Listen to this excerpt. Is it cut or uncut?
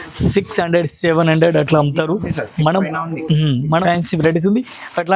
cut